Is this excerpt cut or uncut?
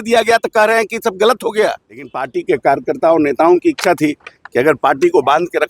cut